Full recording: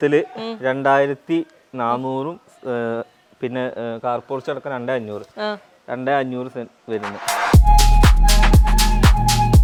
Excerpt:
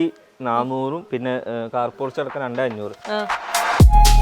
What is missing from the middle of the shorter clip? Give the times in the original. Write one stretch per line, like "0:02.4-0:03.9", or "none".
0:02.4-0:03.3
0:05.7-0:07.1